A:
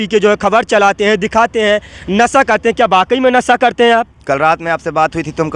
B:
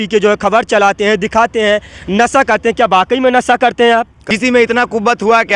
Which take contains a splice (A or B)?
B